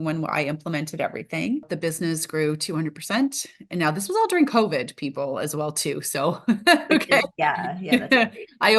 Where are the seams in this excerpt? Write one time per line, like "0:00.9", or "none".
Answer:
0:01.6

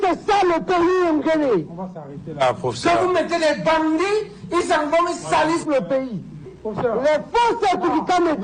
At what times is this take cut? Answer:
0:06.5

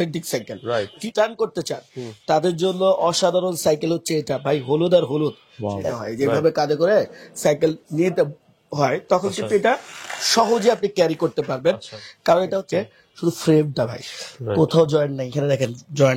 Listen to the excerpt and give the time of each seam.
0:01.0
0:05.9
0:12.6

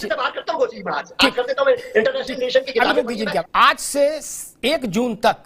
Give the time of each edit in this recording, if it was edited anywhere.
0:03.4

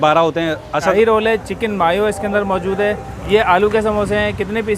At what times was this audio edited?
0:00.9
0:03.1

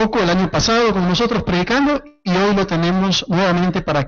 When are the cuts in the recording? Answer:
0:03.2

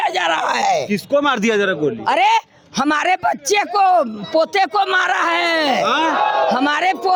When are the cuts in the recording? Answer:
none

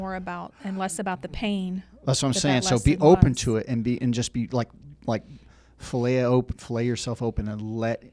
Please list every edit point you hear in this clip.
none

